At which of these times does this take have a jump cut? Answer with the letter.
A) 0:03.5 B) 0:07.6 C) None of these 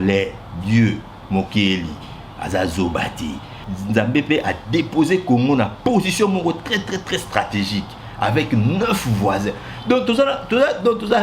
A